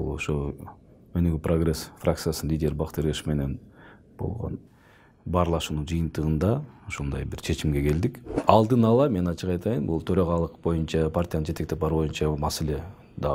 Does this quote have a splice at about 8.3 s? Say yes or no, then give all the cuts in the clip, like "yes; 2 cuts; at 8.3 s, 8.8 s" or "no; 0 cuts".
yes; 2 cuts; at 4.6 s, 8.3 s